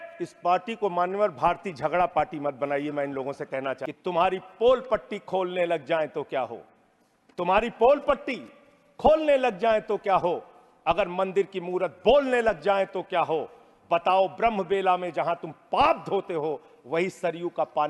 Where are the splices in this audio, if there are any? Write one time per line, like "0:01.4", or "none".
0:03.9